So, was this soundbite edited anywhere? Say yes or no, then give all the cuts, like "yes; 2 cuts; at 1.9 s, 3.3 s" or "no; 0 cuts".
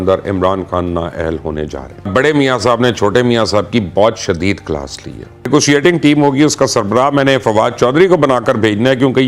yes; 2 cuts; at 2.1 s, 5.5 s